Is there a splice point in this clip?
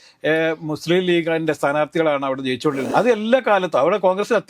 yes; 1 cut; at 2.9 s

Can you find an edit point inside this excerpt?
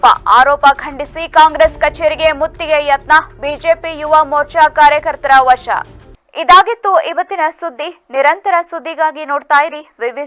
no; 0 cuts

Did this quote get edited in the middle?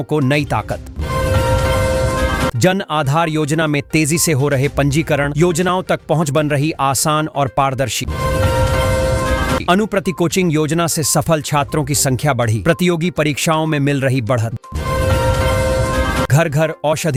no; 0 cuts

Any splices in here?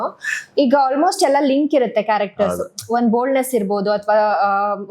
no; 0 cuts

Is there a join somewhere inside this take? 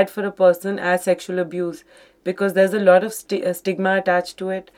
no; 0 cuts

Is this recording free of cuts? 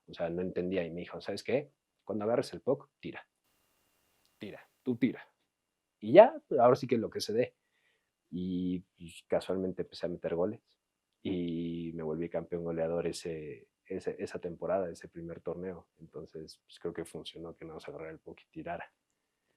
yes; 0 cuts

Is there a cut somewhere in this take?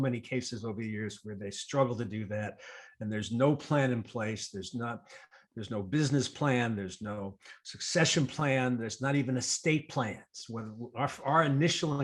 no; 0 cuts

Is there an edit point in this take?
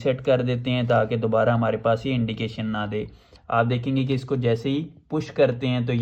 no; 0 cuts

